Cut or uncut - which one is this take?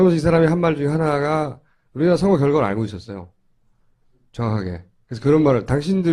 cut